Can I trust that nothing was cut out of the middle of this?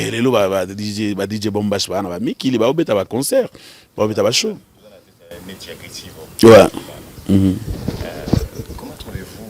yes; 0 cuts

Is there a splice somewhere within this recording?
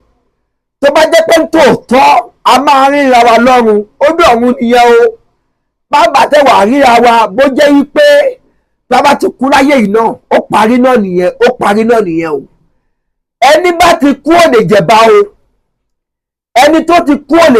no; 0 cuts

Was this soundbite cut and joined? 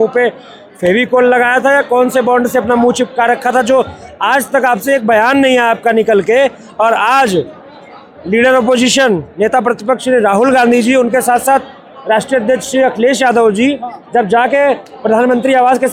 no; 0 cuts

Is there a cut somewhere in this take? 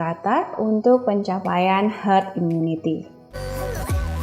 yes; 1 cut; at 3.2 s

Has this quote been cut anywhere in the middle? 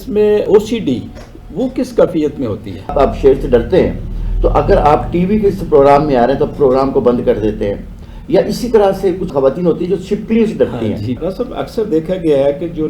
yes; 2 cuts; at 2.7 s, 11.2 s

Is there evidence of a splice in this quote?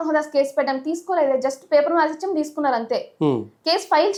no; 0 cuts

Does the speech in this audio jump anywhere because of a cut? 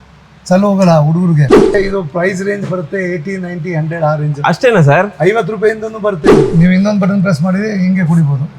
yes; 2 cuts; at 1.7 s, 6.4 s

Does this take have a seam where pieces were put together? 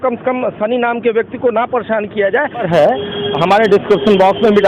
yes; 1 cut; at 2.7 s

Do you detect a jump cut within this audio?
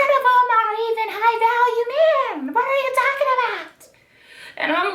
no; 0 cuts

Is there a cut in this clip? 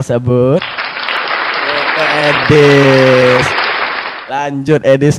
no; 0 cuts

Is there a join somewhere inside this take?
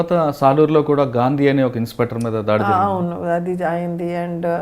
no; 0 cuts

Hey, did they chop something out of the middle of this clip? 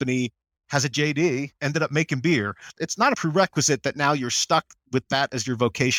yes; 1 cut; at 2.8 s

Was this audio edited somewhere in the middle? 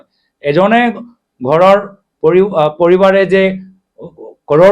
no; 0 cuts

